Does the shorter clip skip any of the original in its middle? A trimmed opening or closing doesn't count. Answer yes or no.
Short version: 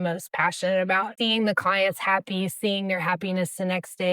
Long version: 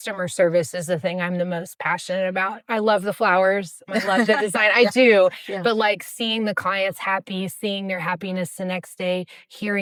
yes